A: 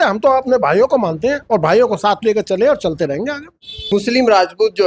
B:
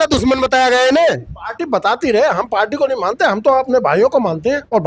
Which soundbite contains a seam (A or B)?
A